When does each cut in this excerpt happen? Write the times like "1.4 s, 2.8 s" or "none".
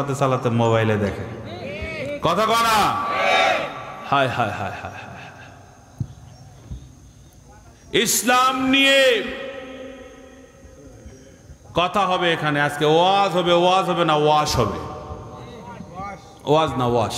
none